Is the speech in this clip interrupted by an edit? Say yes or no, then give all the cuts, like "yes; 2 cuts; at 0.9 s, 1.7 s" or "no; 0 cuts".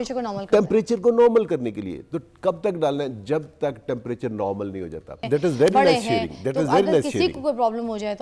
yes; 1 cut; at 5.3 s